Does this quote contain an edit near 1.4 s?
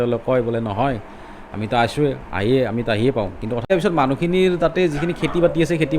no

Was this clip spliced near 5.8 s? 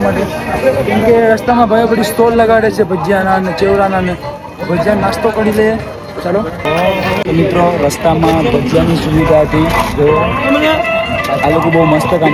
no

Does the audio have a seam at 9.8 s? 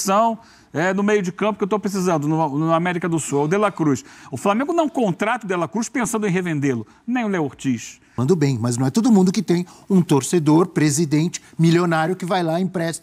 no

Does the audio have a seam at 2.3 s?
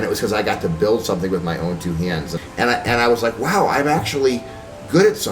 yes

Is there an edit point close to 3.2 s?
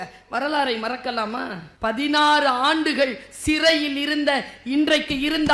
no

